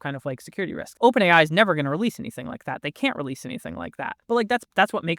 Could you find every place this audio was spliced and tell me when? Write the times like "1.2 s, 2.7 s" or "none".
0.8 s, 4.2 s

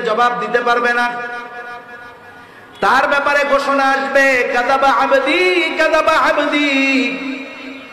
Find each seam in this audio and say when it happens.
none

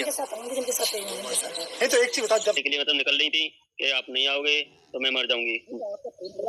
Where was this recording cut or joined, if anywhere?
2.6 s

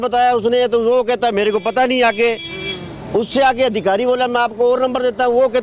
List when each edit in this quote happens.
none

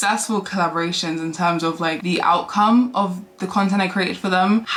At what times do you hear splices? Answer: none

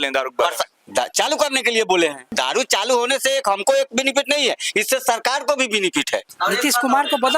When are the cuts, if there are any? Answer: 2.2 s, 6.3 s

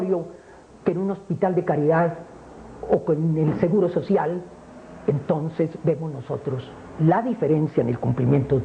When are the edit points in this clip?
2.0 s

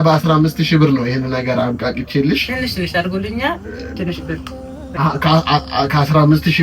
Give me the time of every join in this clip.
4.5 s

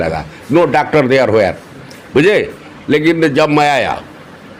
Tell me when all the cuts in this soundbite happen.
none

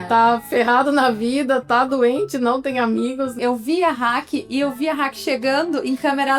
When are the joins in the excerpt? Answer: 3.3 s

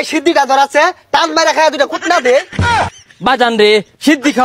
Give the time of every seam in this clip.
2.8 s

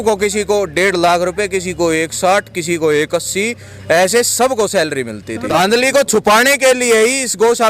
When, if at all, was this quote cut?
5.6 s

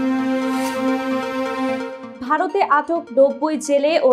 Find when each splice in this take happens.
2.0 s

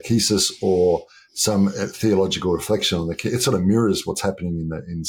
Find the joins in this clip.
none

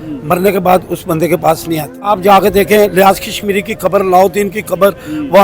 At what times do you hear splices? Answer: 2.1 s

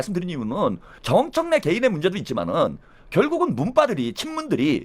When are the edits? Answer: 0.9 s

